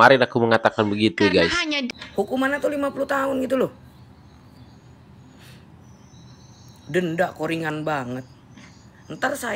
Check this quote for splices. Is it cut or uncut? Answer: cut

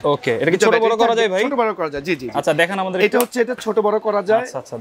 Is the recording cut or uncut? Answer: uncut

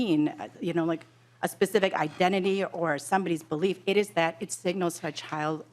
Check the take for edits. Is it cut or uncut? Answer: uncut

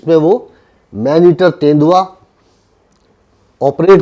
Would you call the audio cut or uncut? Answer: uncut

